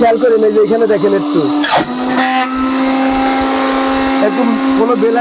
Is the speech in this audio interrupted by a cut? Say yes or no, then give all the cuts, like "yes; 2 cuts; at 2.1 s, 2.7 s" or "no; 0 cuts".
no; 0 cuts